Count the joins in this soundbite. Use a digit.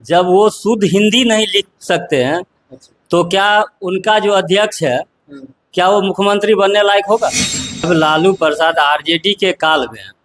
1